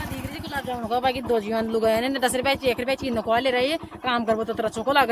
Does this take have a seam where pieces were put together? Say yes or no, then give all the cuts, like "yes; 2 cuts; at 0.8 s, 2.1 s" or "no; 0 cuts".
no; 0 cuts